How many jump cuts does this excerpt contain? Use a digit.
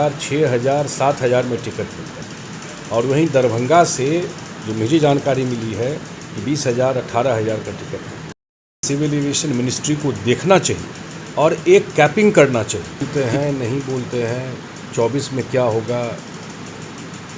2